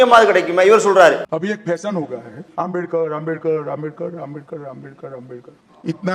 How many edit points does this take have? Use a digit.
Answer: 1